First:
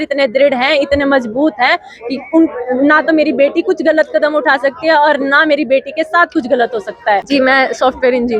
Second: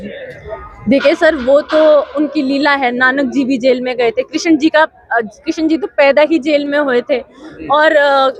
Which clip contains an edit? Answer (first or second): first